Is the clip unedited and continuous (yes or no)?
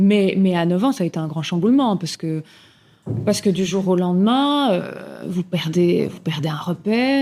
yes